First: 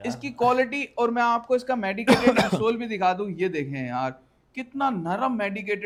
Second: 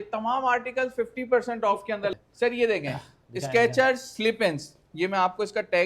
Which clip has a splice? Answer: second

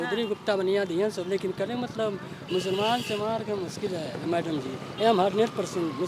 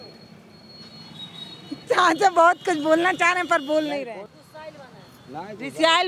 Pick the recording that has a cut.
second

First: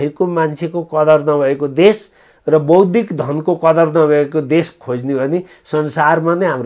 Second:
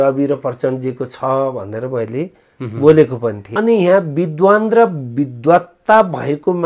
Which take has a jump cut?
second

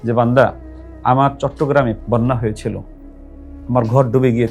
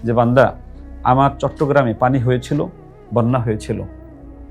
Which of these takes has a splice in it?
first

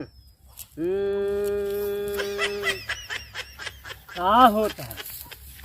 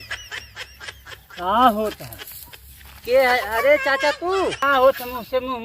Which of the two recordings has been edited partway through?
second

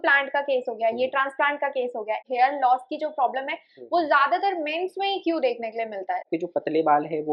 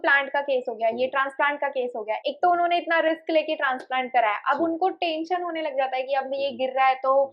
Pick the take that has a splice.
first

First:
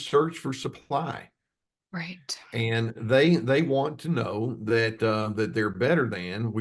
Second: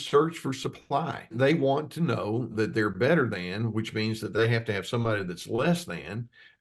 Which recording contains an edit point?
second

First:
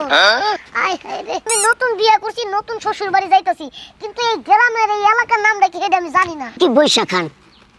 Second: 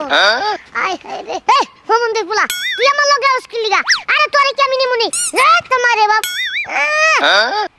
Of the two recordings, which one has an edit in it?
first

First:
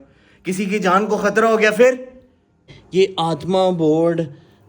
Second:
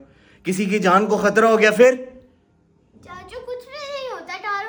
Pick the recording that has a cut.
first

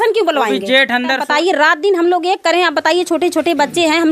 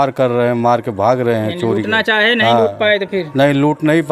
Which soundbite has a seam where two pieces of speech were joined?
first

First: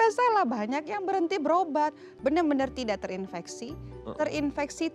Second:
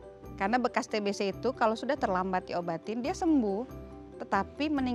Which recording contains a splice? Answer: first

